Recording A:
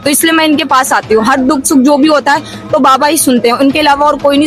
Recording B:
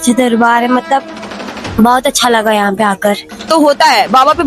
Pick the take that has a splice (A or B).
B